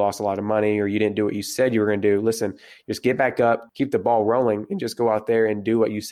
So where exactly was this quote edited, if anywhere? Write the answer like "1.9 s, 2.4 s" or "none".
3.7 s